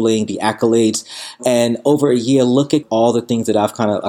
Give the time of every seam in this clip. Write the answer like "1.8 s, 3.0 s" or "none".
1.4 s, 2.8 s